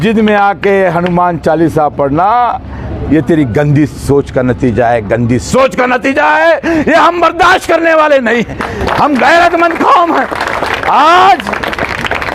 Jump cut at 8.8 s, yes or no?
no